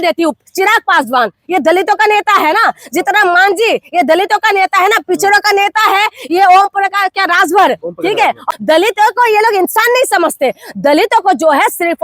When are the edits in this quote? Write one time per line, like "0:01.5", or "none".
0:08.4